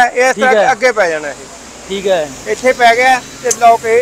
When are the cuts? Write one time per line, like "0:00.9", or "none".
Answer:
none

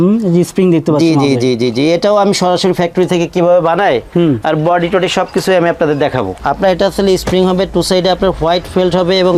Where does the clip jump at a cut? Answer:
none

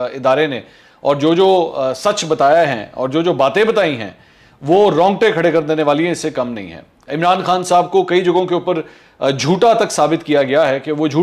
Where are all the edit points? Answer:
none

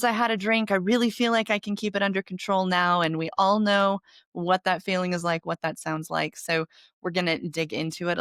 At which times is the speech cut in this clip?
none

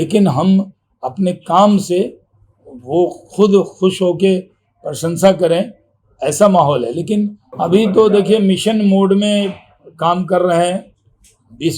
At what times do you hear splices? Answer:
0:07.4

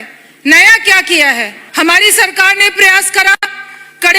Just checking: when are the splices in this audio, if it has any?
0:01.6

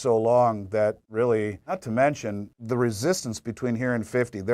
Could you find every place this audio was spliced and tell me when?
0:01.6
0:02.5

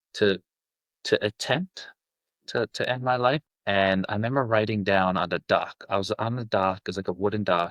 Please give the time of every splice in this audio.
0:03.4

